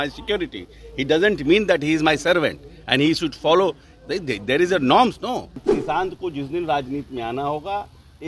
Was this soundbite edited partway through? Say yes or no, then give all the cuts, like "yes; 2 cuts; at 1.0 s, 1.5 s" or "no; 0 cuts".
yes; 1 cut; at 5.7 s